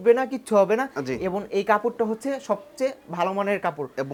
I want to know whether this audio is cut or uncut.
uncut